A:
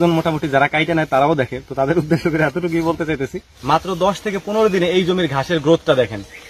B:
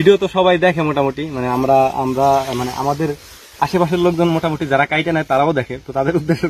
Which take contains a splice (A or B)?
A